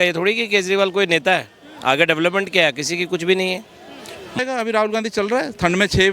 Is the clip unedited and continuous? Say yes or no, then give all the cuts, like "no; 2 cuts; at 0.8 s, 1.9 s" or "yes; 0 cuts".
no; 1 cut; at 4.4 s